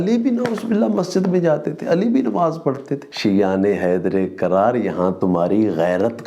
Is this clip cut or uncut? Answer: cut